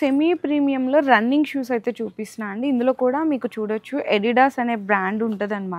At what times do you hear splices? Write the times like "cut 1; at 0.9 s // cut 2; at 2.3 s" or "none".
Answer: none